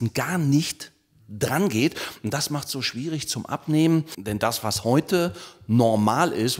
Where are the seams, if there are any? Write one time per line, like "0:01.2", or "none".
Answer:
0:04.2